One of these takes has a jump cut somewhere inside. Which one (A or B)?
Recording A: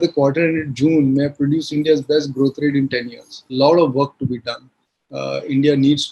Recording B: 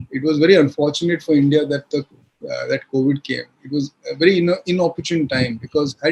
A